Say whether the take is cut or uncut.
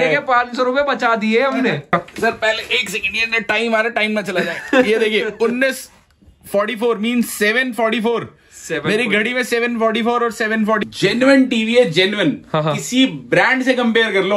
cut